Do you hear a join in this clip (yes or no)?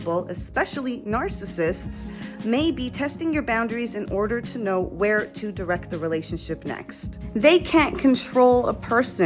yes